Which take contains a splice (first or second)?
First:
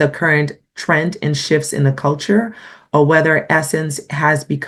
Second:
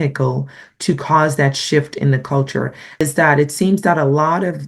second